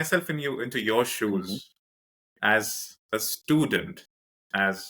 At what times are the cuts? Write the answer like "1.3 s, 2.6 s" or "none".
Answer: 1.7 s